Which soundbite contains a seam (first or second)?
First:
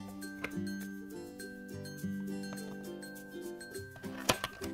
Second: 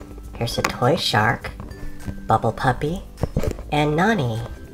second